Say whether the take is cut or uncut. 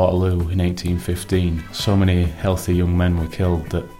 cut